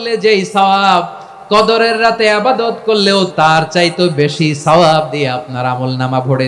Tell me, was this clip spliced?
yes; 1 cut; at 3.3 s

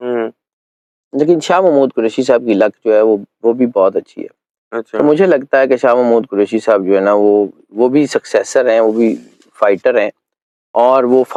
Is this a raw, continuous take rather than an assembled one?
yes; 0 cuts

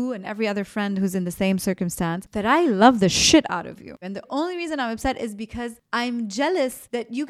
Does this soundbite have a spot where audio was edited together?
yes; 1 cut; at 4.1 s

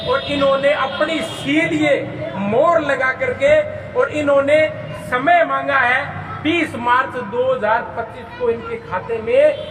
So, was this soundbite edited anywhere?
no; 0 cuts

